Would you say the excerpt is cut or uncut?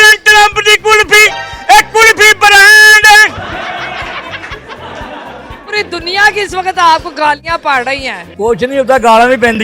cut